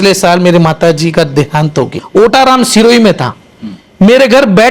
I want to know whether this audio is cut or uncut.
cut